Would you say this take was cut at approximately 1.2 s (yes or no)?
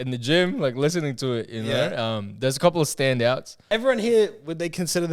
no